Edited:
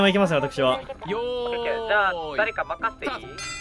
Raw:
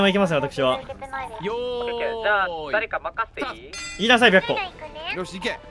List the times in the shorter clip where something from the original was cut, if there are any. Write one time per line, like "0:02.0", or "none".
0:00.9